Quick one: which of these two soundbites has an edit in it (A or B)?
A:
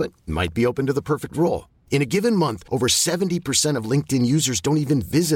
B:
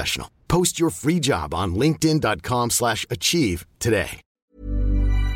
B